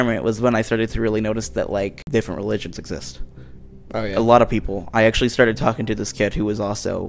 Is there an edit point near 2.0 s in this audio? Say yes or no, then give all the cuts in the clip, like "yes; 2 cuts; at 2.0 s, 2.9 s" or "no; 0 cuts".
yes; 1 cut; at 2.0 s